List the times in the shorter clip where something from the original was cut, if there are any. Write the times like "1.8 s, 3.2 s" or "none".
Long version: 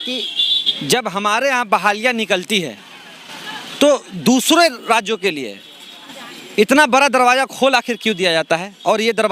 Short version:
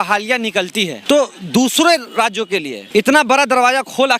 1.0 s, 2.8 s